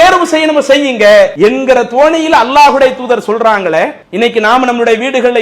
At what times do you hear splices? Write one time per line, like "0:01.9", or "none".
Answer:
0:01.3
0:04.0